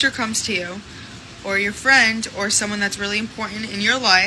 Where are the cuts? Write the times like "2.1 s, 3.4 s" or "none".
none